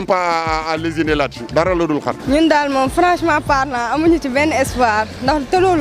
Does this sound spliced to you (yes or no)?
yes